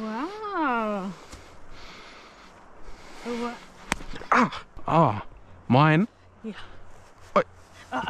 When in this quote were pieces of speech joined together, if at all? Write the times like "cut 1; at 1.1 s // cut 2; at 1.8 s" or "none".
cut 1; at 4.7 s

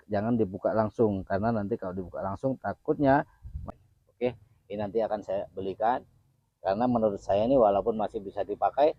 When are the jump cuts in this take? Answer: cut 1; at 3.8 s

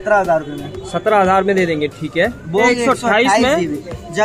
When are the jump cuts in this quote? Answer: cut 1; at 2.7 s

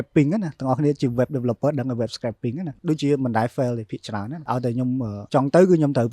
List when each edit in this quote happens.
cut 1; at 2.7 s // cut 2; at 4.8 s

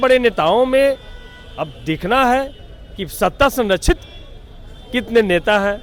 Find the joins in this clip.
none

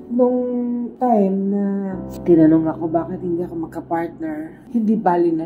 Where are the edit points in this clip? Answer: cut 1; at 2.0 s // cut 2; at 4.6 s

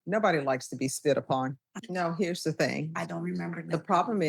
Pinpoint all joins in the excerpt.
cut 1; at 1.7 s

